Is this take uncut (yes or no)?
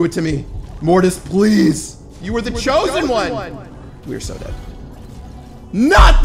no